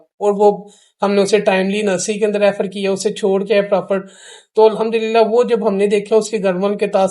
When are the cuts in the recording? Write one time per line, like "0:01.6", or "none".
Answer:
none